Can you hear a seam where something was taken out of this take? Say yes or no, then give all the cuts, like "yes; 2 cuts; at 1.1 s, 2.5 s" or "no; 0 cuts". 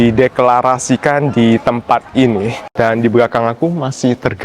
yes; 1 cut; at 2.6 s